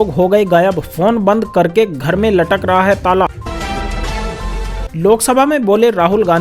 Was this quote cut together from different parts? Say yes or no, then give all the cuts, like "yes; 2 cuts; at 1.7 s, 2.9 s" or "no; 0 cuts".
yes; 2 cuts; at 3.4 s, 4.9 s